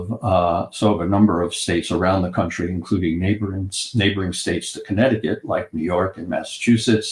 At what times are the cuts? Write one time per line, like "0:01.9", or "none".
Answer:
none

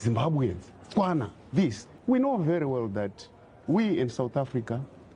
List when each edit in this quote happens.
0:01.9

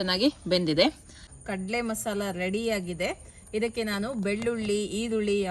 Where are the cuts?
0:01.2

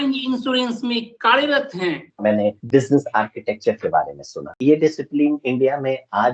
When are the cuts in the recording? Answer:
0:02.1
0:04.6

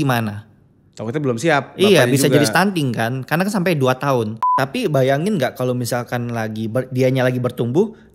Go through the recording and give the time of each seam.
0:04.4

